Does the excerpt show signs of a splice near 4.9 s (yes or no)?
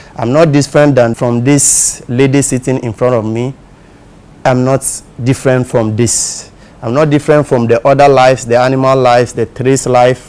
no